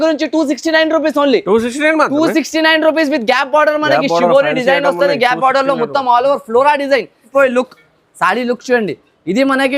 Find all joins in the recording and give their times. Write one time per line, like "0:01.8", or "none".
0:07.2